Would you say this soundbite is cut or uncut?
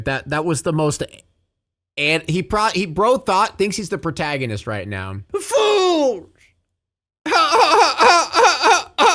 uncut